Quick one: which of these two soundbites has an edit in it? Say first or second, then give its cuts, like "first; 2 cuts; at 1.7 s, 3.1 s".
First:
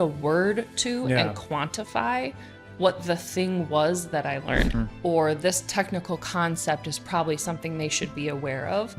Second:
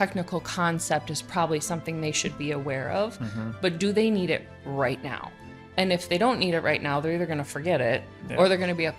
first; 1 cut; at 4.7 s